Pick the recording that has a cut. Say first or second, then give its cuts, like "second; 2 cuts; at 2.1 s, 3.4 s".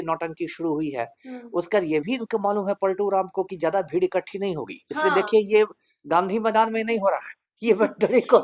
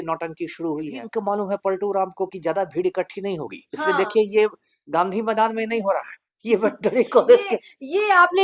second; 1 cut; at 1.0 s